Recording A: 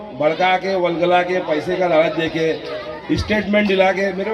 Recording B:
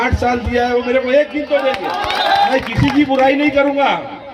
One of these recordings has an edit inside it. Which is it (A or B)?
B